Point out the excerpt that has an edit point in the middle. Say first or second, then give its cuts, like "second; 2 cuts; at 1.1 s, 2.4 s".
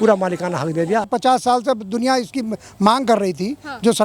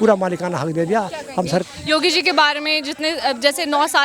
first; 1 cut; at 1.1 s